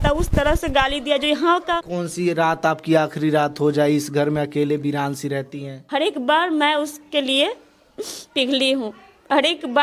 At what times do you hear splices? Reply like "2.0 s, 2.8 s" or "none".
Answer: 1.9 s, 5.7 s

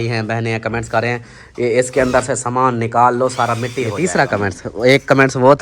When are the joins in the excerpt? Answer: 4.0 s

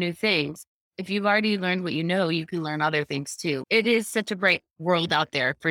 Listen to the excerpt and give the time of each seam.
4.7 s

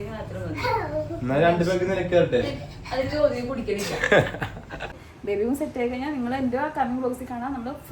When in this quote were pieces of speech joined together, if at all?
5.1 s

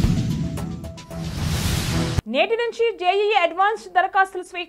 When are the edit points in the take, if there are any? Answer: 2.2 s

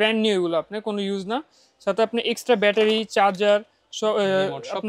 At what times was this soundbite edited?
none

